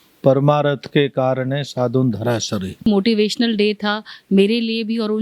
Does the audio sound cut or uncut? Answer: cut